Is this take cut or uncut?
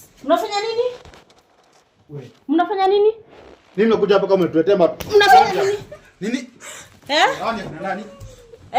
uncut